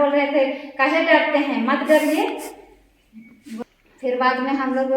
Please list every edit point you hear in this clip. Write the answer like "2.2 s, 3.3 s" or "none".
3.6 s